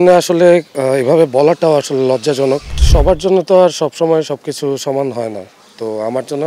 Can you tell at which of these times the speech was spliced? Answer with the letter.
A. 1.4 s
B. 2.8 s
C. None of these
B